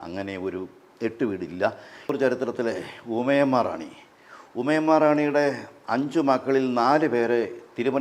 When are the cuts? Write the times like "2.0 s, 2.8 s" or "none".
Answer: 2.1 s